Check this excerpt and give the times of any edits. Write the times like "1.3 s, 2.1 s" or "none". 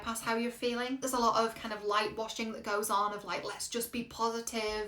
1.0 s

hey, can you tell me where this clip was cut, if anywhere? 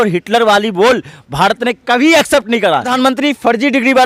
2.9 s

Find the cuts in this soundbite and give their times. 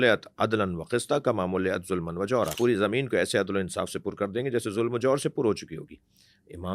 2.5 s

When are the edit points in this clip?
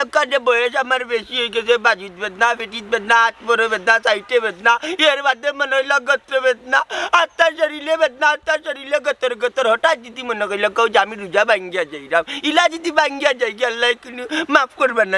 none

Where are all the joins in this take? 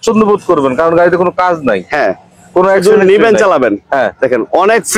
none

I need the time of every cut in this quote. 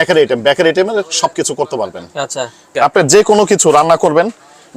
2.7 s

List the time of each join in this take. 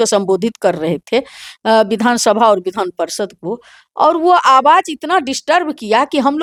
none

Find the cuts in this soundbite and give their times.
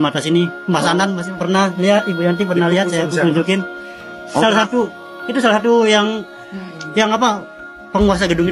none

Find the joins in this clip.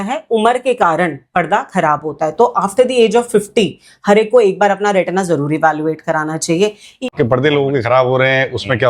7.1 s

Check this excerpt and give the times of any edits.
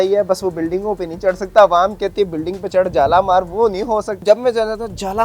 4.2 s

